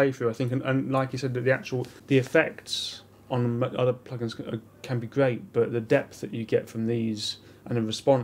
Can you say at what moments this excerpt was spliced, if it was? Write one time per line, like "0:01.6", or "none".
0:02.0